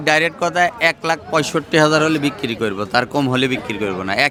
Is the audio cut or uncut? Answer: uncut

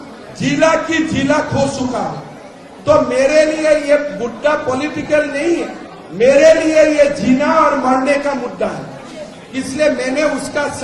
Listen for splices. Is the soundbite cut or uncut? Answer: uncut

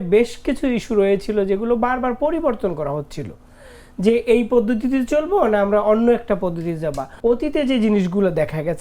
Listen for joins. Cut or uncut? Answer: cut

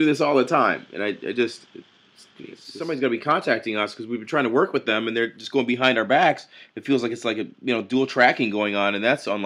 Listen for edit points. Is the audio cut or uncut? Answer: cut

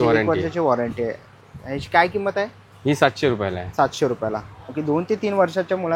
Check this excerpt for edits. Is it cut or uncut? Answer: uncut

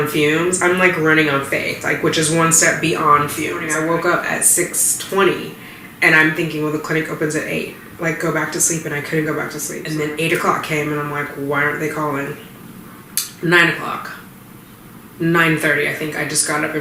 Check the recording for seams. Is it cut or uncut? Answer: cut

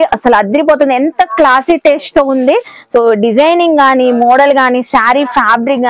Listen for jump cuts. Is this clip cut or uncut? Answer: uncut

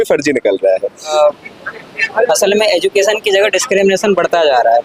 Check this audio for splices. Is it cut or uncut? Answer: cut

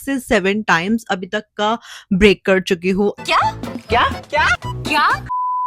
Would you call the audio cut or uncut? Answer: uncut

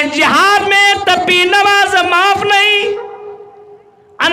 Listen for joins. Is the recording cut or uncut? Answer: uncut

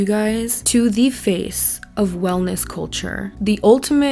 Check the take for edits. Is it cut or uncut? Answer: uncut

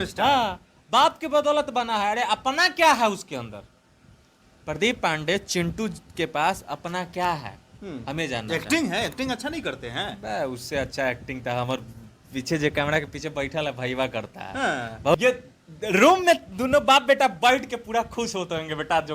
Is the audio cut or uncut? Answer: cut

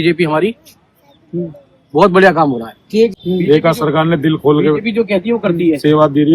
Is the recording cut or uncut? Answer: cut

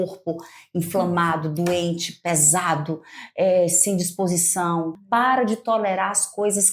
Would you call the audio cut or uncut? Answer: cut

